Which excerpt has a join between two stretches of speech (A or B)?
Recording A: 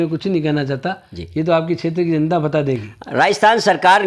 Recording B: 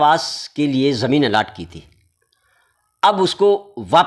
A